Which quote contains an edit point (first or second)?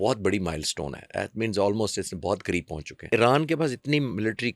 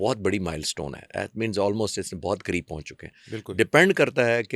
first